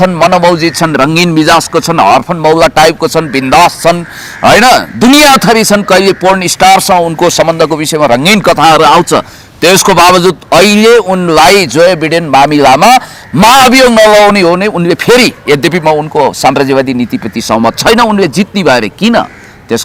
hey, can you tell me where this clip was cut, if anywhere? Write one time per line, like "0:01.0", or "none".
none